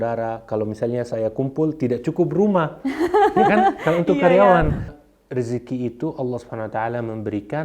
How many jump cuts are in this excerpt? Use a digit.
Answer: 1